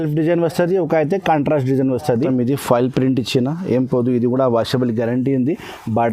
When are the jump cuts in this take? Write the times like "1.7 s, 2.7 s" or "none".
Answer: 2.3 s